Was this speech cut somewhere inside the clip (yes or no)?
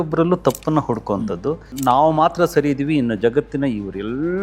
yes